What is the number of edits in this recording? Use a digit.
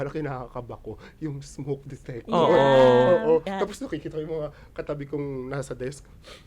1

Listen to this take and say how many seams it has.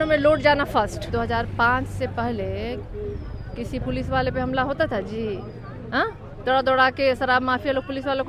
1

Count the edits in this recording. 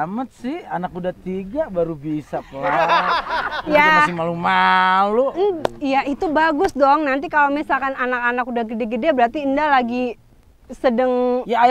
0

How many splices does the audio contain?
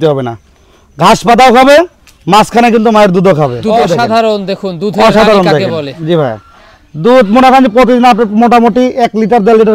1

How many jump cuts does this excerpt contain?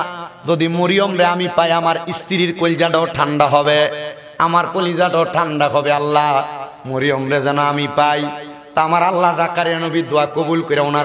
0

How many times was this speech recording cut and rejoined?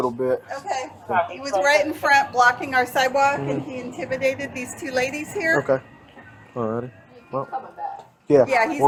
0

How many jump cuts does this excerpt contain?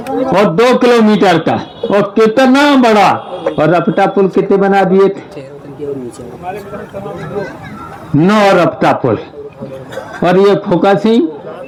0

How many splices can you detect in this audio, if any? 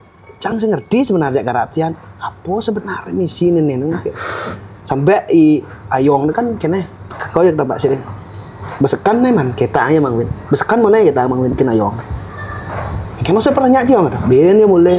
0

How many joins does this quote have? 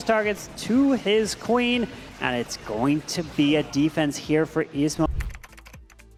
0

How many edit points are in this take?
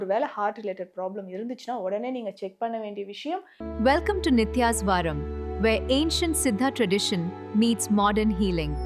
1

